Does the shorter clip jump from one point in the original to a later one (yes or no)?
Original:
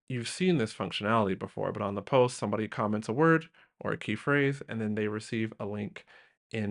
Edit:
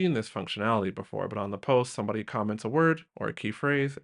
yes